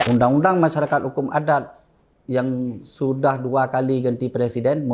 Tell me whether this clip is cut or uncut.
uncut